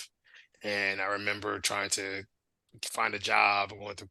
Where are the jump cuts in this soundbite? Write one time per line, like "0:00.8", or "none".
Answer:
0:02.4